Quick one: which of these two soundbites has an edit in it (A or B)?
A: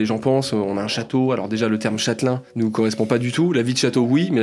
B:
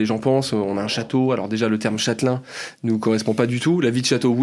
A